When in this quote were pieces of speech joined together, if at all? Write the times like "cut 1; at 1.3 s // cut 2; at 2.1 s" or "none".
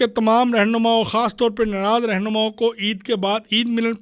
none

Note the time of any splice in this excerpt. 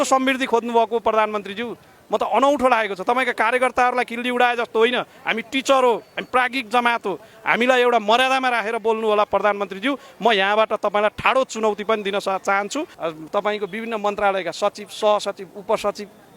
cut 1; at 12.9 s

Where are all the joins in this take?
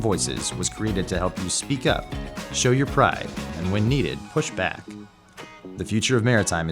cut 1; at 4.8 s

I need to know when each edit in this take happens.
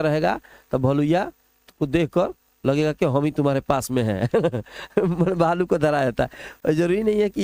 none

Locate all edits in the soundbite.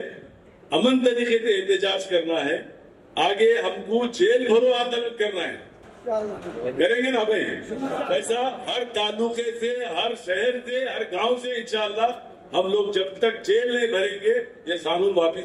none

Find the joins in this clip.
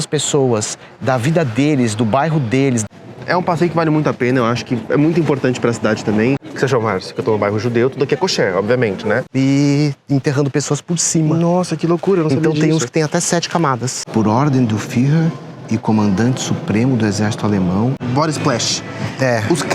cut 1; at 2.8 s // cut 2; at 6.5 s // cut 3; at 9.3 s // cut 4; at 14.0 s // cut 5; at 18.0 s

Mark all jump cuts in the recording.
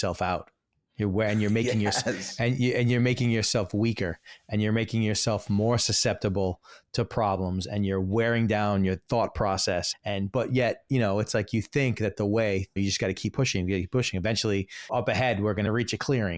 cut 1; at 9.9 s // cut 2; at 12.8 s // cut 3; at 14.9 s // cut 4; at 15.7 s

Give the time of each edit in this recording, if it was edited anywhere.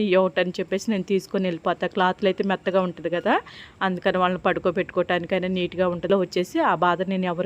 cut 1; at 6.1 s

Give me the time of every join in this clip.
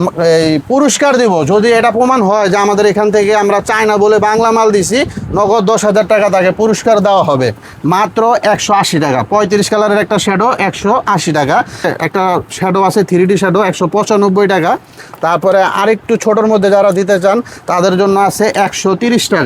cut 1; at 7.7 s // cut 2; at 11.9 s

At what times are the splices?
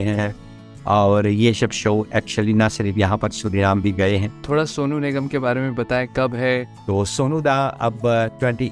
cut 1; at 4.4 s // cut 2; at 6.7 s

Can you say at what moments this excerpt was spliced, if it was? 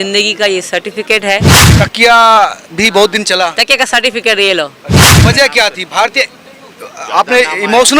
cut 1; at 1.6 s // cut 2; at 5.1 s

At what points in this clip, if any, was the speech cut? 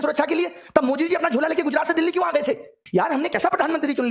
cut 1; at 3.1 s

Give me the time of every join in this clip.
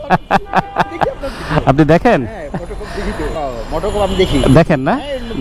cut 1; at 3.3 s

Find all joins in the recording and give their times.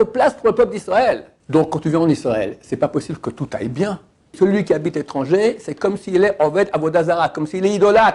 cut 1; at 1.3 s // cut 2; at 4.4 s

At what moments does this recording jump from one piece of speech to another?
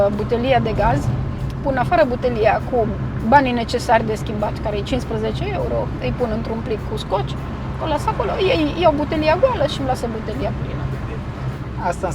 none

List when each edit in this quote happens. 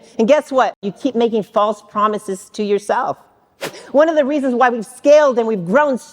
cut 1; at 0.9 s // cut 2; at 3.8 s

